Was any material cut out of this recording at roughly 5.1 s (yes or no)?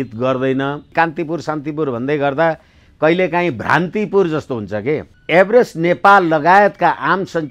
yes